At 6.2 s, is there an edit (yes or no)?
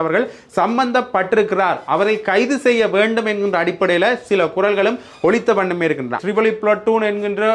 yes